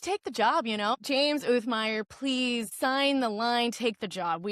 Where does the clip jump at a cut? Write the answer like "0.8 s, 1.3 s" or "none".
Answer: 1.0 s, 2.7 s